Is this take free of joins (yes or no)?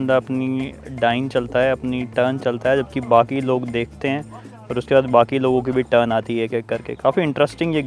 yes